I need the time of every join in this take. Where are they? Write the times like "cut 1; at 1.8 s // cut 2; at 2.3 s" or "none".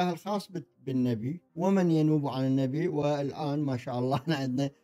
cut 1; at 1.4 s

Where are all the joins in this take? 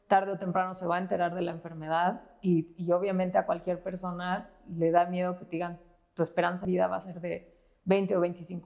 cut 1; at 6.6 s

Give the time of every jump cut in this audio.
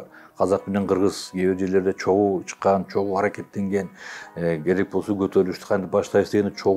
none

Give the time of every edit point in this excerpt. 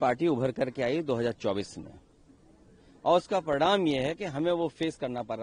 none

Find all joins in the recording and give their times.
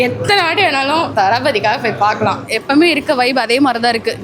cut 1; at 1.1 s // cut 2; at 2.4 s

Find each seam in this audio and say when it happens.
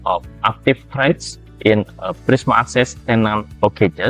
none

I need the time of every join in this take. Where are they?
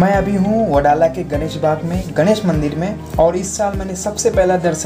cut 1; at 3.0 s

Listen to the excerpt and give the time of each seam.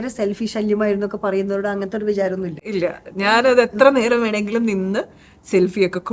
none

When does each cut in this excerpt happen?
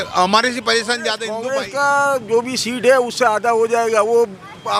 cut 1; at 1.5 s

